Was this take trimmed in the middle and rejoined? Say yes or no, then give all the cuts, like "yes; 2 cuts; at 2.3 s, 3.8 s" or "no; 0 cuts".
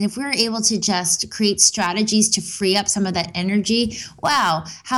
no; 0 cuts